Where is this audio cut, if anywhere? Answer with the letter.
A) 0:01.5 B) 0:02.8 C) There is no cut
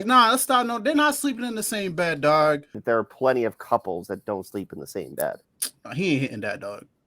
B